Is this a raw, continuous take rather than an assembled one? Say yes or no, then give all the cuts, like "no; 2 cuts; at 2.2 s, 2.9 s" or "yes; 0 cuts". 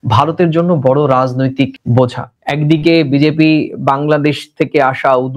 no; 1 cut; at 2.3 s